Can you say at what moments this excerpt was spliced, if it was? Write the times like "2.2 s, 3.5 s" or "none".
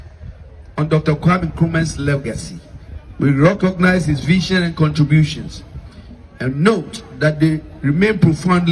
none